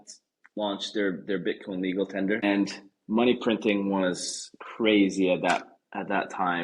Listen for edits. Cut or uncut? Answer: cut